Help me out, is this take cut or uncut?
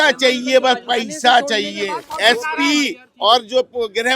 cut